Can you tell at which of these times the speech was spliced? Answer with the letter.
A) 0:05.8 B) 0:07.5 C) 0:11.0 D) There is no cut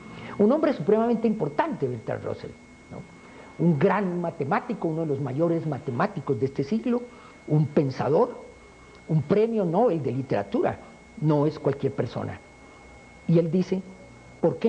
A